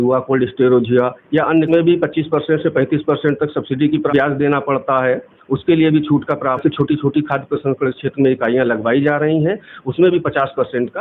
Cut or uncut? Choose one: cut